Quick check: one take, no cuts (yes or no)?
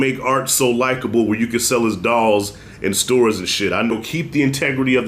no